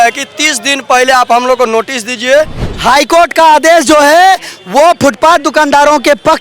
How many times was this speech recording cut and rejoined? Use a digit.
1